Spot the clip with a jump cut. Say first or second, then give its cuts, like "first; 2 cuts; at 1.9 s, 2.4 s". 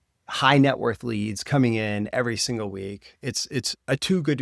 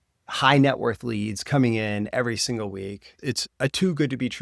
second; 1 cut; at 3.1 s